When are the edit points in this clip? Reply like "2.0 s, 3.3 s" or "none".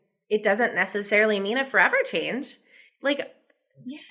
none